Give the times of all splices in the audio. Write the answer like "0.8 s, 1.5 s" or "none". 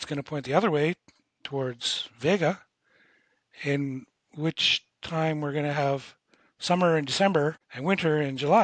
7.7 s